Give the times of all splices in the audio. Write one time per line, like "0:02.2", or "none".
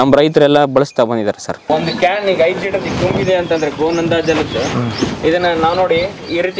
0:01.7